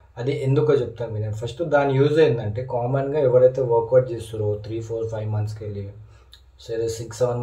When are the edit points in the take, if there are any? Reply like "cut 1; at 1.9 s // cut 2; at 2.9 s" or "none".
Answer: none